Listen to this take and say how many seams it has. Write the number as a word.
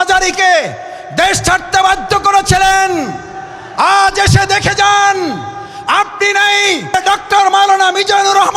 one